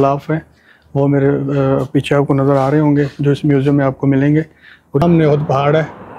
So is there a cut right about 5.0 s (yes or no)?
yes